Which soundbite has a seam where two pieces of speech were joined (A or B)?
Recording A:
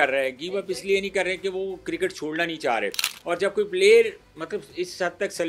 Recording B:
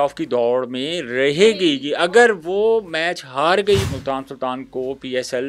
B